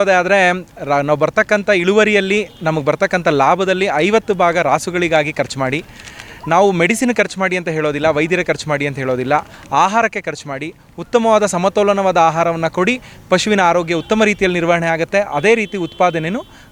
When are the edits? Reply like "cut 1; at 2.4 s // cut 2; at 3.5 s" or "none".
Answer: none